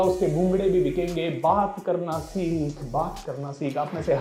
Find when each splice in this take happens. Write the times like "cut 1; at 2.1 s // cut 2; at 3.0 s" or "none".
none